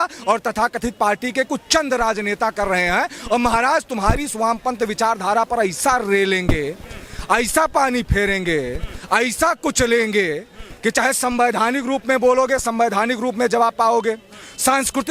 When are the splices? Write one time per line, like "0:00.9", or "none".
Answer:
none